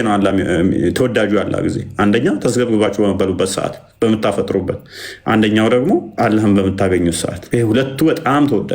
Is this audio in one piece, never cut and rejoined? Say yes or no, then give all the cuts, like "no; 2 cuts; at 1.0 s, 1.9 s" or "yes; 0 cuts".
no; 2 cuts; at 6.1 s, 7.3 s